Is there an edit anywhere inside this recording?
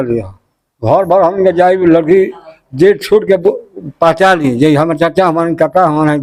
no; 0 cuts

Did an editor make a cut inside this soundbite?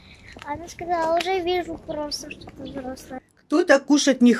yes; 1 cut; at 3.2 s

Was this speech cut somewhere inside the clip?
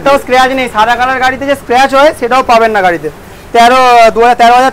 no; 0 cuts

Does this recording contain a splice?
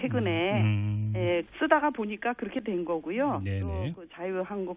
yes; 1 cut; at 2.9 s

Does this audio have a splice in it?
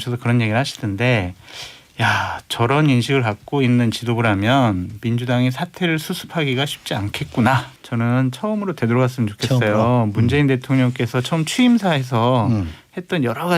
yes; 1 cut; at 7.8 s

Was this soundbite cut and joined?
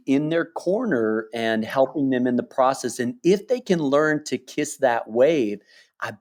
no; 0 cuts

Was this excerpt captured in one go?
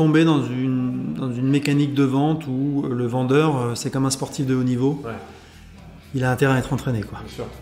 yes; 0 cuts

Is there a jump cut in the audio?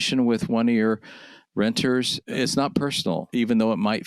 yes; 2 cuts; at 2.2 s, 3.3 s

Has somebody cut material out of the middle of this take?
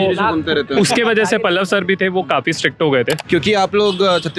yes; 1 cut; at 3.2 s

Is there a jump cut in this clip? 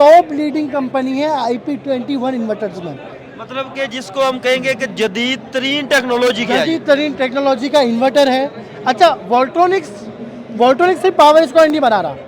no; 0 cuts

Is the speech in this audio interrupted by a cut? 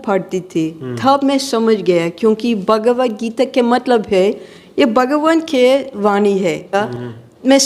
yes; 1 cut; at 6.7 s

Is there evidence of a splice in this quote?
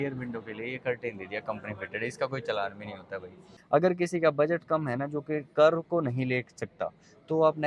yes; 1 cut; at 3.5 s

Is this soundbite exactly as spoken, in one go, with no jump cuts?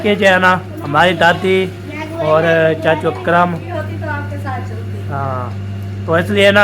no; 1 cut; at 3.6 s

